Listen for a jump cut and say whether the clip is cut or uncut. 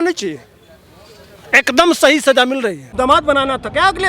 cut